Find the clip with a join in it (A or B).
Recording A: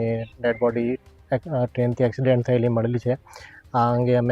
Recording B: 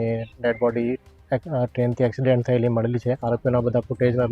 B